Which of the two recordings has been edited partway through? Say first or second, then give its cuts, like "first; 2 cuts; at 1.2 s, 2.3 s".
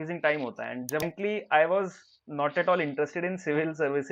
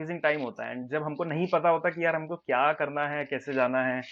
first; 1 cut; at 1.1 s